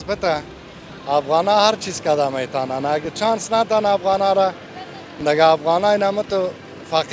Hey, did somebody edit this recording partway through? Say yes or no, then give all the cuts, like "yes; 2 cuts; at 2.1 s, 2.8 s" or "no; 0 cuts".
no; 0 cuts